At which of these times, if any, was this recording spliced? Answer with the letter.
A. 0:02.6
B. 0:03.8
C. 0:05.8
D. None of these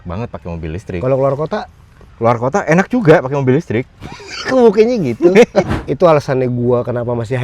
C